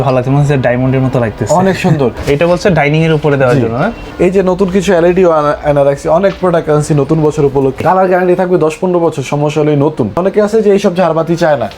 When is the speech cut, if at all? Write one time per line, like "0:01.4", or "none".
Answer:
0:02.2
0:04.0
0:07.8
0:10.2